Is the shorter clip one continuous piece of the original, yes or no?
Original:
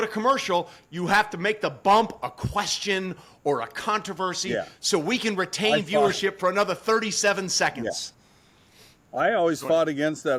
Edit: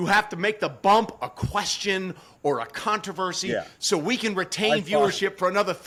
yes